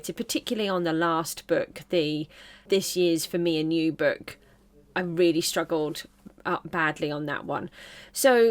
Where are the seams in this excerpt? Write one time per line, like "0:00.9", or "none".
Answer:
0:02.6